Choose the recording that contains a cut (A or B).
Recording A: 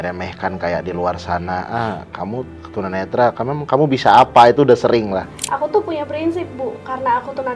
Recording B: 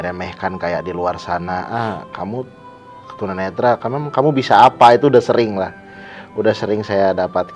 A